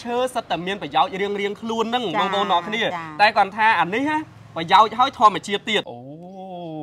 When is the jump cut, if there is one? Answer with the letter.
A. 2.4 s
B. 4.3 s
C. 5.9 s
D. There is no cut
C